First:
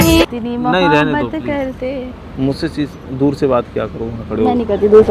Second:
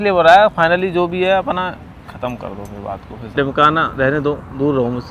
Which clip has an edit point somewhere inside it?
second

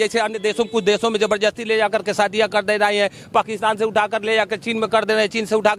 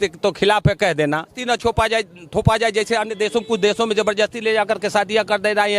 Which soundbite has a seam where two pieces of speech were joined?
second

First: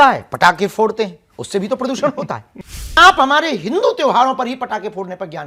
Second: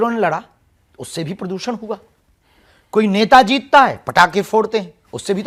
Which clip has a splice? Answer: first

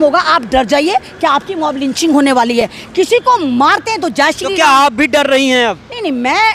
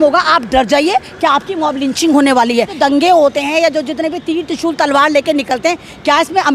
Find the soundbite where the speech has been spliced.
second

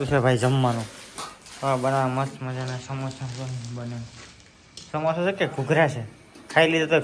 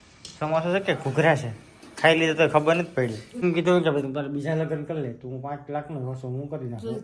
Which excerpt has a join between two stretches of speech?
second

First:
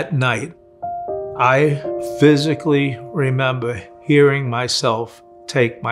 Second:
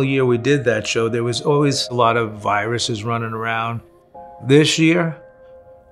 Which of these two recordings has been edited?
first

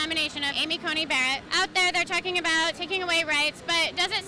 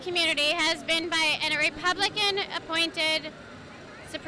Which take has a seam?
first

